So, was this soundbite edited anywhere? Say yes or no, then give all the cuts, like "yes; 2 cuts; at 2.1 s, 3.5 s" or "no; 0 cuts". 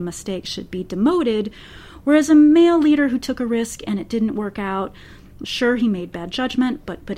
yes; 1 cut; at 5.4 s